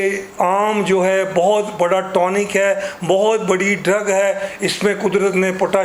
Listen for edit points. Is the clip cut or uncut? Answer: uncut